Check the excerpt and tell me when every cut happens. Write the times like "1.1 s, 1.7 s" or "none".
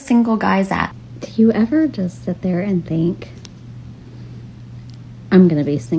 0.9 s